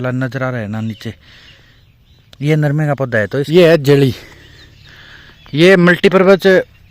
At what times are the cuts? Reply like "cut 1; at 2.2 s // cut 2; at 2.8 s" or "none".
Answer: cut 1; at 3.5 s